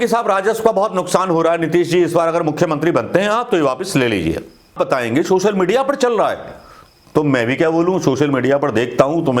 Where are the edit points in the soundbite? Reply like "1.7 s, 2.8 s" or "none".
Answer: 4.7 s